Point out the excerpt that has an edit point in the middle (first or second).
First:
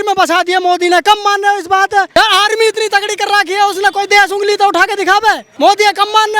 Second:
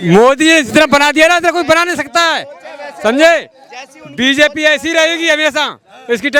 first